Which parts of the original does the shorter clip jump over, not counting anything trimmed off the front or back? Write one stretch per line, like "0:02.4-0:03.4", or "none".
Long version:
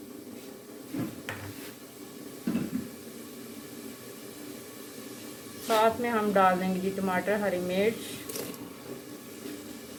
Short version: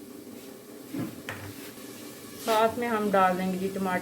0:01.8-0:05.0